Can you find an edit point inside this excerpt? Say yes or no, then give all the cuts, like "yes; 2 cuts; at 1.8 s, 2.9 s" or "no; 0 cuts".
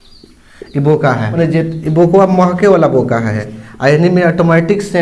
yes; 2 cuts; at 1.3 s, 3.4 s